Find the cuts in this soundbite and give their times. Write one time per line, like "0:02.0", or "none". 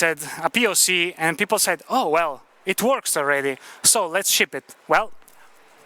none